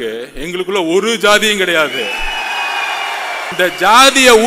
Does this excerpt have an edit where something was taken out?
yes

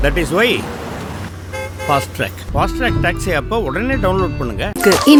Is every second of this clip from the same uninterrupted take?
yes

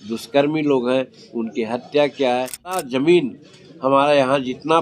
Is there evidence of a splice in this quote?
yes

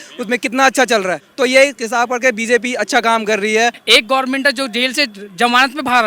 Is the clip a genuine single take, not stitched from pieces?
no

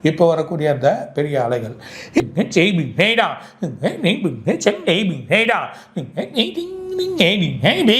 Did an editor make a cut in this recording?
yes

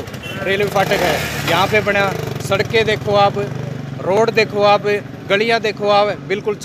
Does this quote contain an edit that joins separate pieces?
no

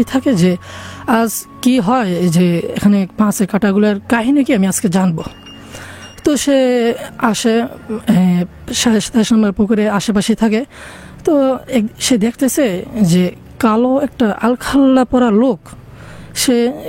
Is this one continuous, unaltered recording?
yes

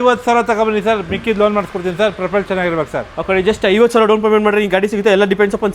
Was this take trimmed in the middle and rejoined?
no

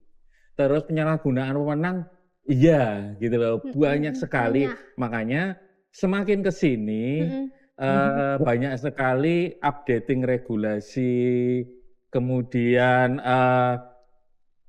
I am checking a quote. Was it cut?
no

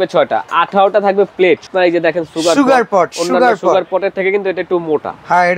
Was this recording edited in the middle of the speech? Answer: yes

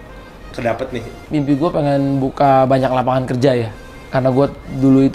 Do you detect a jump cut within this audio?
yes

